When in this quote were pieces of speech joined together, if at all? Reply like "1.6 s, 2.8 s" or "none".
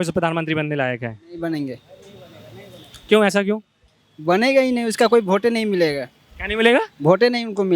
none